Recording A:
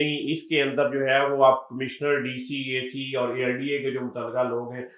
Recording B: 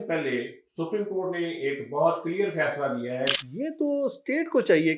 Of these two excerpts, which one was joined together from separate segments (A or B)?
B